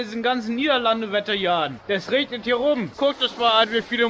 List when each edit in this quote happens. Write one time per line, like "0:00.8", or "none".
0:01.8
0:02.9